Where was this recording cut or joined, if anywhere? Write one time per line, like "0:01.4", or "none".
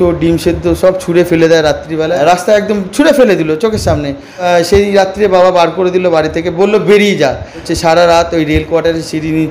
0:02.2
0:04.4
0:07.7